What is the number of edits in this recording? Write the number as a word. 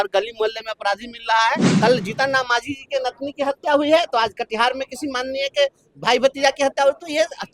one